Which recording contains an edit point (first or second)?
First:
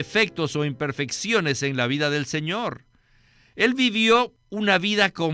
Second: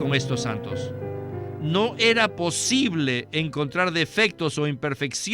first